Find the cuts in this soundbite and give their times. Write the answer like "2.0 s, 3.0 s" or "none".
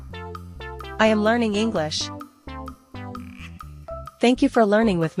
1.0 s, 2.6 s, 4.2 s